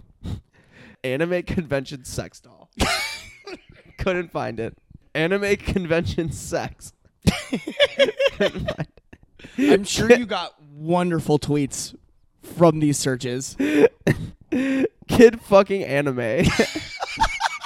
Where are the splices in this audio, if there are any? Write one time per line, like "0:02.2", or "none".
0:01.0
0:05.0